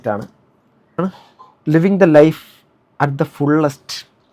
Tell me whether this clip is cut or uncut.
cut